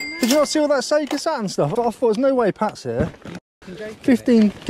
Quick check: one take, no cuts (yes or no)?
no